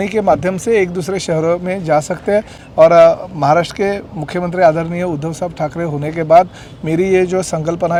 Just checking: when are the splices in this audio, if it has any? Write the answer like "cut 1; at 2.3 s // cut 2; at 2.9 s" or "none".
none